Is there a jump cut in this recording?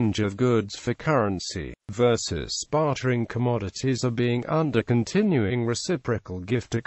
no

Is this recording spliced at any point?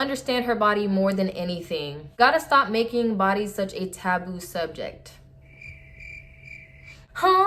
no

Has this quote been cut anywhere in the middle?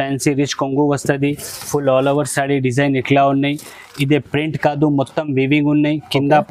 no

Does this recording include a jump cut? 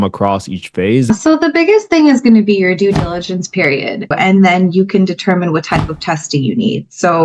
yes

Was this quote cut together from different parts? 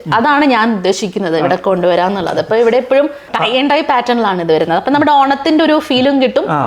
yes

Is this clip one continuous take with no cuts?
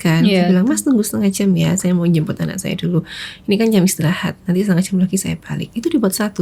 yes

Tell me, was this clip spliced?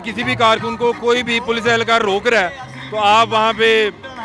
no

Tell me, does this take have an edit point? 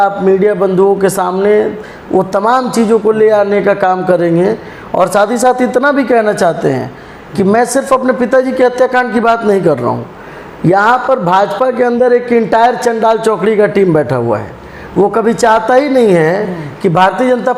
no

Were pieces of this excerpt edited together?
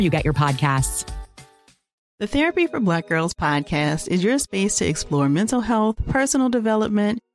no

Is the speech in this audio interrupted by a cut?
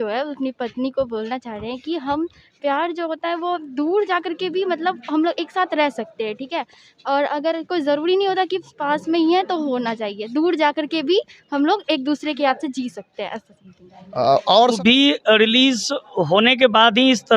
yes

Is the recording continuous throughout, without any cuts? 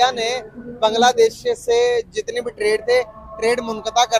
yes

